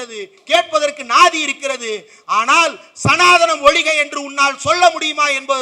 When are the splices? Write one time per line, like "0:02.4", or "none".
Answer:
none